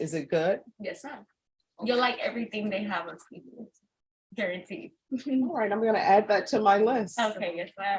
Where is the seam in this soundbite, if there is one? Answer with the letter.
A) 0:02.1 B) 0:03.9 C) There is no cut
C